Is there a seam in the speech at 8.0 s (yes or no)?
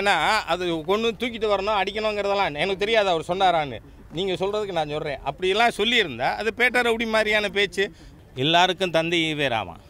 yes